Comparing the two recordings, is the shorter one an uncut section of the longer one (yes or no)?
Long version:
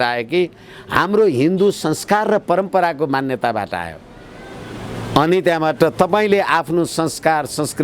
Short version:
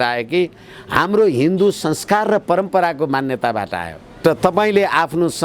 no